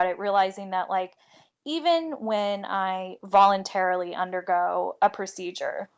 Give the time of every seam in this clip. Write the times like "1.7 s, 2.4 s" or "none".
none